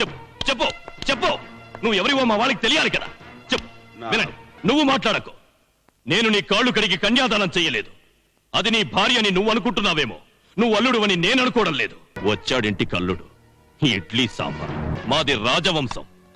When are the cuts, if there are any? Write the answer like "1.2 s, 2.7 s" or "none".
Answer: 4.5 s, 12.2 s, 15.0 s